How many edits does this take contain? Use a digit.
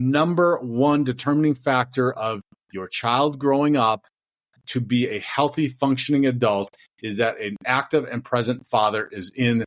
0